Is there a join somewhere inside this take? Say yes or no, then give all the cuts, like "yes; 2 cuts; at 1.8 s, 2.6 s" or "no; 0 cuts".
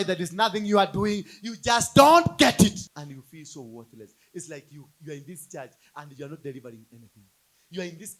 yes; 1 cut; at 2.9 s